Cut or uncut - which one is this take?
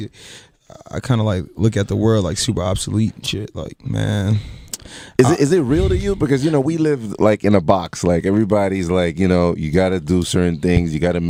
uncut